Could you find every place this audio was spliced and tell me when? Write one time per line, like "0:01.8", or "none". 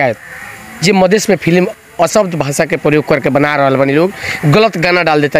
none